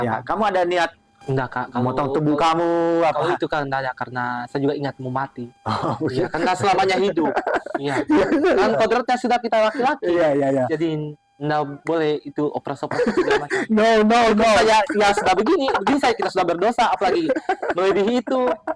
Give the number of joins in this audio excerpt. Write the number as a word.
one